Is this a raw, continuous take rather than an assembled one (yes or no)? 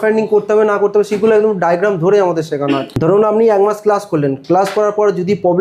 no